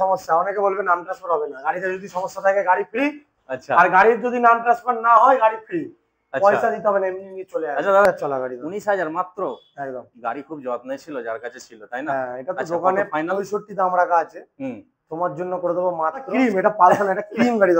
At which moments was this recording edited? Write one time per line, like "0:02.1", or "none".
0:08.0
0:16.3